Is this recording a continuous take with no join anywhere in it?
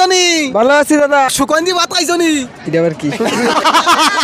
no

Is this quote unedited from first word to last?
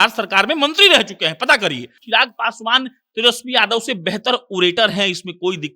no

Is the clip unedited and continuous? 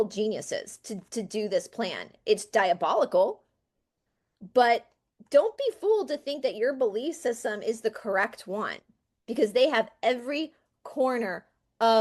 yes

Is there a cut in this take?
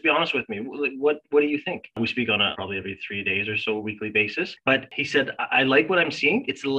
yes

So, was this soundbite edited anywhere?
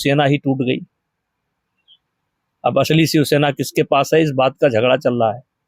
no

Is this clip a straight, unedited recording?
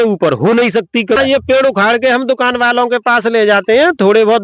no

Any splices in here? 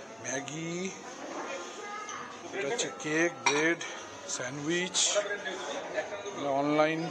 no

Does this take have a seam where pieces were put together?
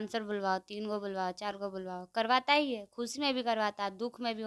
no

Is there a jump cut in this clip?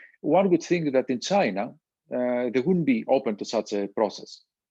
no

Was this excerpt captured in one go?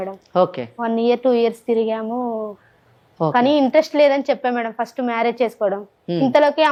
yes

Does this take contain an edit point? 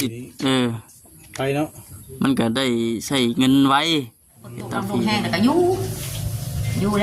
yes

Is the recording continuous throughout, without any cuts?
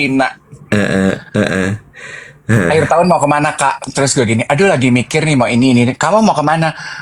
yes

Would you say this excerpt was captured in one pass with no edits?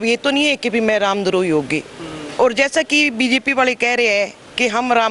yes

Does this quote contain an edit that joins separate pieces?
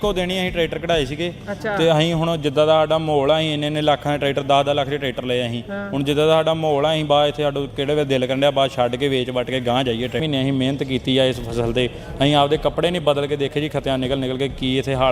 yes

